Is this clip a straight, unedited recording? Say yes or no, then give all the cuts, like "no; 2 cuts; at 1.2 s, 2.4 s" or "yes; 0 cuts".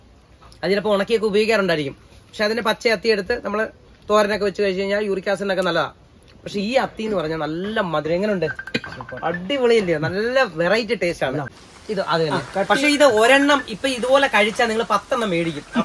no; 1 cut; at 11.5 s